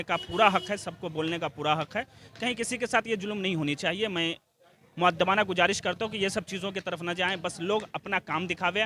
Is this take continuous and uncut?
yes; 0 cuts

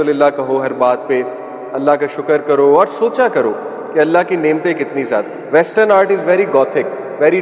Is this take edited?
yes; 1 cut; at 5.3 s

